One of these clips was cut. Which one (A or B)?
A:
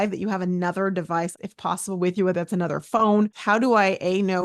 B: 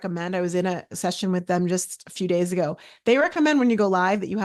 A